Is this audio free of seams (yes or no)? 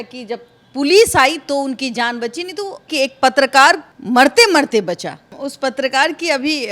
no